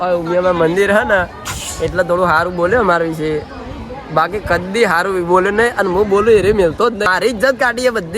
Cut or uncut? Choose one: cut